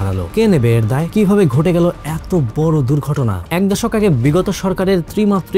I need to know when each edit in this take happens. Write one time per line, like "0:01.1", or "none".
0:03.4